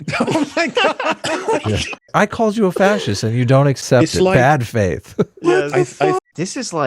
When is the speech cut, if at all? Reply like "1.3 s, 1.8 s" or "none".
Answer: 2.1 s, 3.8 s, 6.2 s